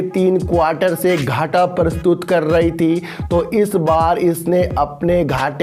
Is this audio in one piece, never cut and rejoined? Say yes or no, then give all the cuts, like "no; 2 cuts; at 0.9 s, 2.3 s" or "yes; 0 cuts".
yes; 0 cuts